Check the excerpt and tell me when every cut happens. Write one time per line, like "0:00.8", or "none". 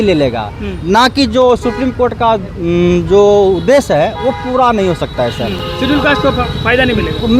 none